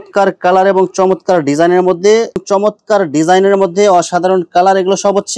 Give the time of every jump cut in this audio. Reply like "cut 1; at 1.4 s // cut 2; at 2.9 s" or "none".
cut 1; at 2.4 s